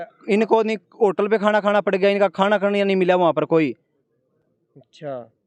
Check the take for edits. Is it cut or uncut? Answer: uncut